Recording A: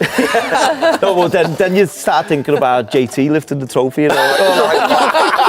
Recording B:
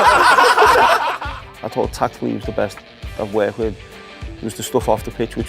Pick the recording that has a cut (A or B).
B